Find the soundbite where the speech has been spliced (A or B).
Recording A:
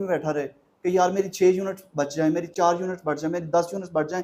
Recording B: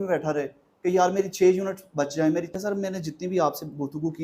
B